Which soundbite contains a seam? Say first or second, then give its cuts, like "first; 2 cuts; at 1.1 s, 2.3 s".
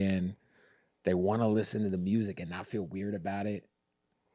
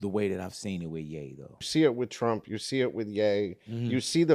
second; 1 cut; at 1.6 s